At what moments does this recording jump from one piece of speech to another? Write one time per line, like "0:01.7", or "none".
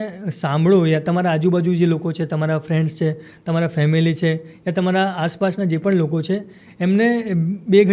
none